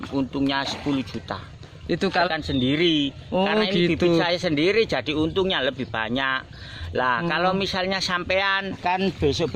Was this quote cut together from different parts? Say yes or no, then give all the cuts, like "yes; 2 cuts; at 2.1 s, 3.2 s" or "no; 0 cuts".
yes; 2 cuts; at 2.3 s, 8.8 s